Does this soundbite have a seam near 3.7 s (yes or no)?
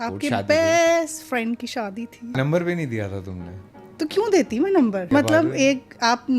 no